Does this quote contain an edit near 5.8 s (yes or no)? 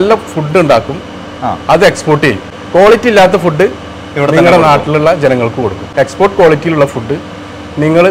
yes